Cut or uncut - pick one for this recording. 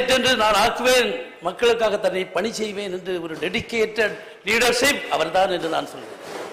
uncut